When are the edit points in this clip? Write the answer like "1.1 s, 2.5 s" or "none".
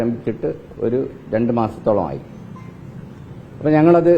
none